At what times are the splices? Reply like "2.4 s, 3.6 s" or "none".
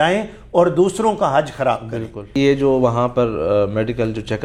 none